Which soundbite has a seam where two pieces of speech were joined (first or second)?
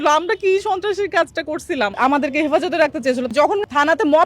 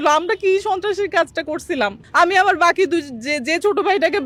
first